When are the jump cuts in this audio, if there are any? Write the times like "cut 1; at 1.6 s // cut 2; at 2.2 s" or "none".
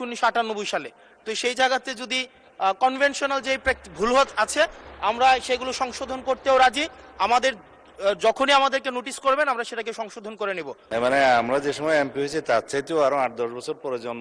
cut 1; at 10.8 s